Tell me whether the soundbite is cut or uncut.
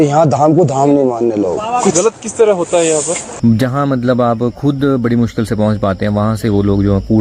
cut